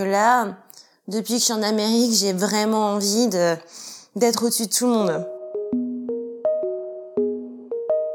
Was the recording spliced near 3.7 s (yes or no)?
no